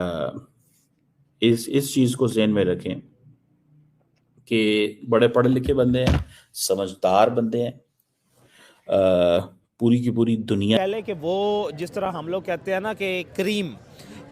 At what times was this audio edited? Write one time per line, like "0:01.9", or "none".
0:10.8